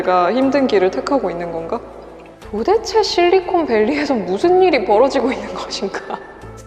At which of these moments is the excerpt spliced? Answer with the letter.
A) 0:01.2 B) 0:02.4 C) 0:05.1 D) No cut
B